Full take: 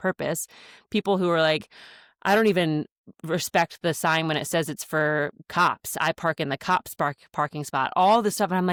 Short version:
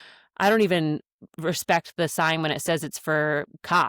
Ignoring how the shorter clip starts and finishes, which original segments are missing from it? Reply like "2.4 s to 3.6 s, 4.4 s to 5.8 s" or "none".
none

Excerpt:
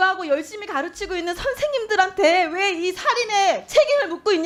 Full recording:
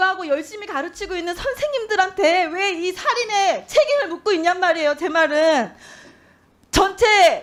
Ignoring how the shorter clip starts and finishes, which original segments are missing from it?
none

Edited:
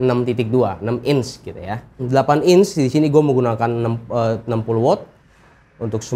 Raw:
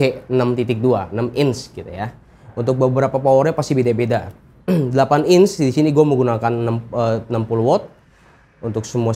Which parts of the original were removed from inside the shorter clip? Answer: 2.4 s to 4.9 s

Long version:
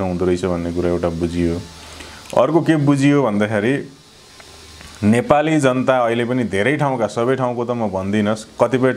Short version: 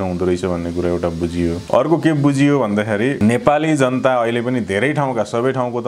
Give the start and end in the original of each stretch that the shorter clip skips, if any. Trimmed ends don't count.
1.6 s to 2.2 s, 3.8 s to 5.0 s

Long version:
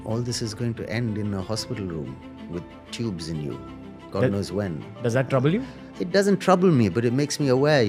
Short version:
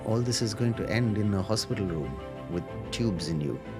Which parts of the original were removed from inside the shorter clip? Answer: none

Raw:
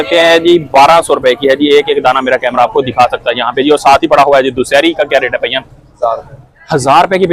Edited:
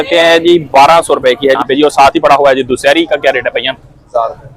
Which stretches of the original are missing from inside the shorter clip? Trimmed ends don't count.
1.6 s to 3.5 s

